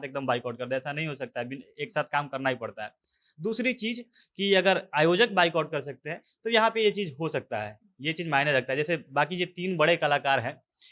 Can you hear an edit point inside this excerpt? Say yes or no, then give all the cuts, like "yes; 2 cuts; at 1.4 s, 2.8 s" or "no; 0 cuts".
no; 0 cuts